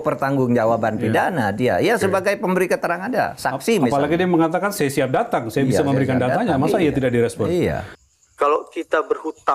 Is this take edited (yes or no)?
yes